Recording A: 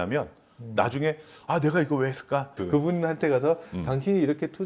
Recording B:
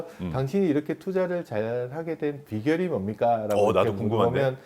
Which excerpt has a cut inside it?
A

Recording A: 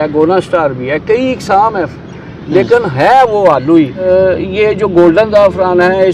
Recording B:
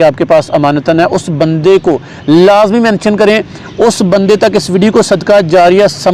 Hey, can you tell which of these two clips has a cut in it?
A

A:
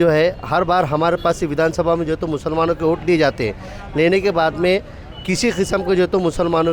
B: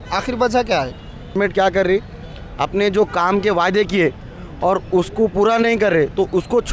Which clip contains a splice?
B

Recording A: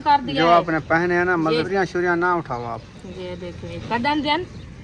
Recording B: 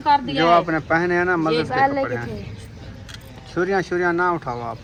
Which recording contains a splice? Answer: A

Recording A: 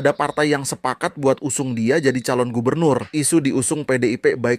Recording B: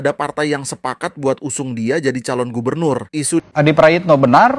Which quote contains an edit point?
B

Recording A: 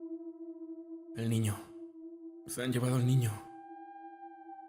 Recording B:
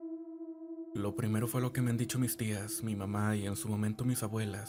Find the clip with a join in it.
A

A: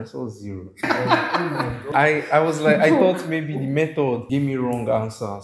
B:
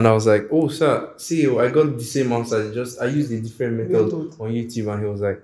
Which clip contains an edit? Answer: A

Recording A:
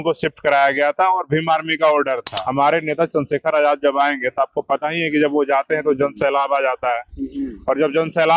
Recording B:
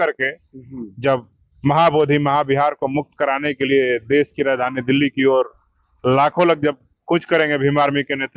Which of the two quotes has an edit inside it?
A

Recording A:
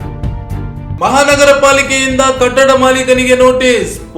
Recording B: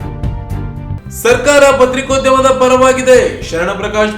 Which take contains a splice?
A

